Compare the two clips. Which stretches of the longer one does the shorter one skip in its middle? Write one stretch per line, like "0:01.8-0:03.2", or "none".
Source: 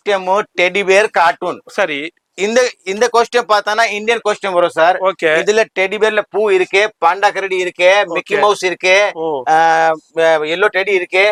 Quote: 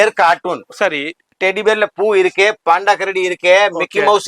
0:02.3-0:05.7